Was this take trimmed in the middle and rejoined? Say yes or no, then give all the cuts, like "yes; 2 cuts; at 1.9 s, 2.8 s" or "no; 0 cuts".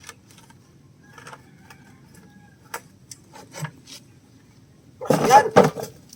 no; 0 cuts